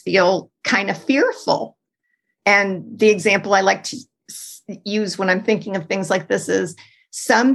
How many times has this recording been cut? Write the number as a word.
zero